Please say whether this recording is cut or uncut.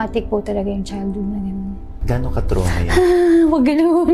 uncut